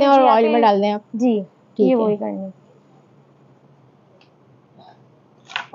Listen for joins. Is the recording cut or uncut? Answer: uncut